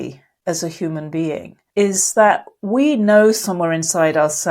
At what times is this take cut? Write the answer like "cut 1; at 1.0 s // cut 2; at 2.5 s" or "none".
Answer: cut 1; at 1.6 s